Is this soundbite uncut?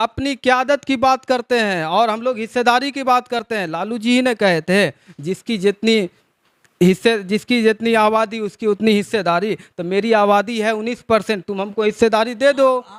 yes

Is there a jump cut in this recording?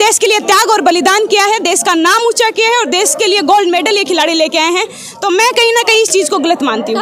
no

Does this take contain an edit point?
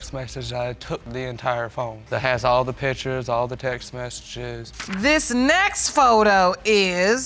yes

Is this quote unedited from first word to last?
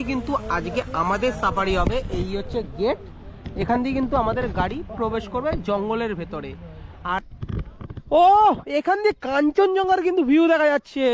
no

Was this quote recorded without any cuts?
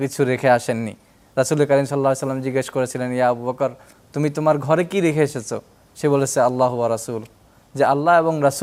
yes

